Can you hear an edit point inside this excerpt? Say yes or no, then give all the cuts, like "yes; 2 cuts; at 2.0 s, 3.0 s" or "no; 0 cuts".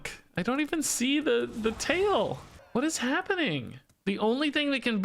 yes; 2 cuts; at 2.5 s, 3.9 s